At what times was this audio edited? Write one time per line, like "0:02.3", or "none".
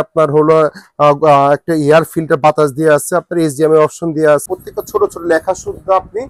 0:04.4